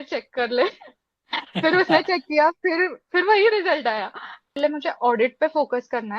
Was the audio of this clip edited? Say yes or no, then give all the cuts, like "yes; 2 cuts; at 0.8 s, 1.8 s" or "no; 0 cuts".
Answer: yes; 1 cut; at 4.6 s